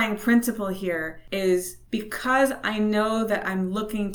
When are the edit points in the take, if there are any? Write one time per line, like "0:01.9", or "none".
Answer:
0:01.2
0:01.8